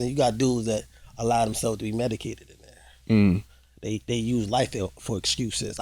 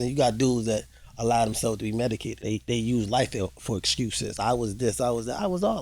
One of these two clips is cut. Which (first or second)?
second